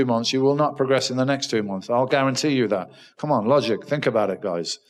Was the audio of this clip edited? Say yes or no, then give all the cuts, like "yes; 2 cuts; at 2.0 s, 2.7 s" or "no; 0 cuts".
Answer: no; 0 cuts